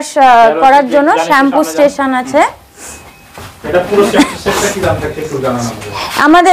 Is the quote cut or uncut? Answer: uncut